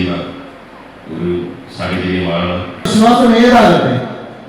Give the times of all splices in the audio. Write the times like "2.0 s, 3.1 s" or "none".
2.7 s